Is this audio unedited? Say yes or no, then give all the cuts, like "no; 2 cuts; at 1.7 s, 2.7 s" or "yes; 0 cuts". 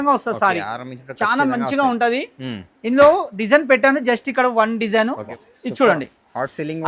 no; 1 cut; at 5.3 s